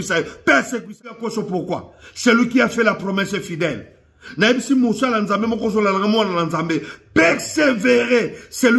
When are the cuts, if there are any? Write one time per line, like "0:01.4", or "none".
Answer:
0:01.1